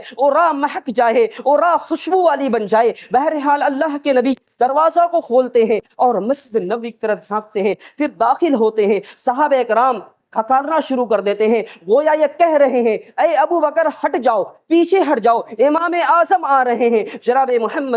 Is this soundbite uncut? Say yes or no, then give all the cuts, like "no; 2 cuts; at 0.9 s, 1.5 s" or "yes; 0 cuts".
yes; 0 cuts